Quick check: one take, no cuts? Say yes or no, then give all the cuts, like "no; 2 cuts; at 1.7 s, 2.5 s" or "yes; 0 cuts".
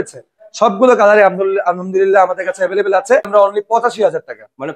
no; 1 cut; at 3.3 s